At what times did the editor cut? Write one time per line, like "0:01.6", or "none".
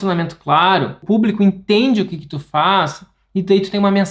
0:01.0